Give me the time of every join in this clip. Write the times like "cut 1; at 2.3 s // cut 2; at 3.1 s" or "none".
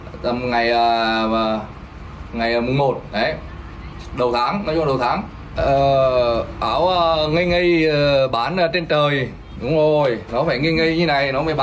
cut 1; at 5.4 s